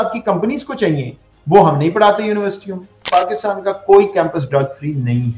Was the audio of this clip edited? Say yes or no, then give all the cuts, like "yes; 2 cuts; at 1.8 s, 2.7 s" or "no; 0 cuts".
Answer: yes; 1 cut; at 3.0 s